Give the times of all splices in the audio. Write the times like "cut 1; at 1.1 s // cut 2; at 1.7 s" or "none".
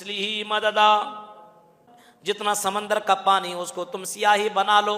cut 1; at 2.3 s

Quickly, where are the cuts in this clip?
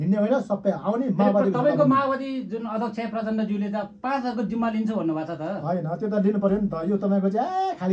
none

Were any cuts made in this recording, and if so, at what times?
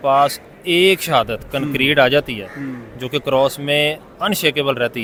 none

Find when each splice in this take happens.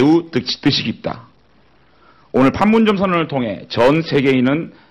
cut 1; at 1.2 s

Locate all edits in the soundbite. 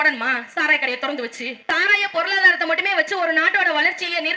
cut 1; at 1.6 s

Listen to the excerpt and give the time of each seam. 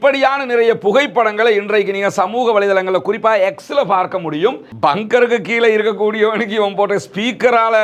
cut 1; at 4.7 s

